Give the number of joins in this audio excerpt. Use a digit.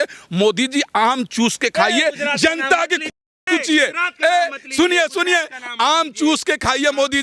0